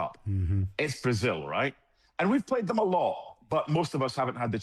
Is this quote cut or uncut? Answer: uncut